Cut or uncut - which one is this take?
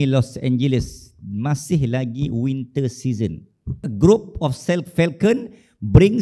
cut